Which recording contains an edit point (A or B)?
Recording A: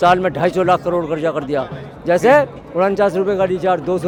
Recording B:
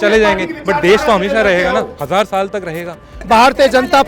B